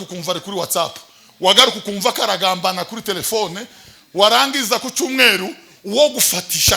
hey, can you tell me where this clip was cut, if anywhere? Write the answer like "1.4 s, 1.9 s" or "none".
none